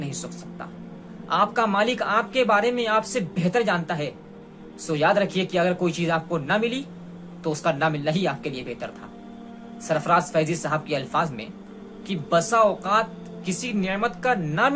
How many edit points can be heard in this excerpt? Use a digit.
0